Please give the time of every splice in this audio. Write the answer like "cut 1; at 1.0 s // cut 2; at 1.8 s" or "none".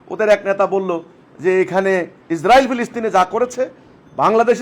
cut 1; at 2.2 s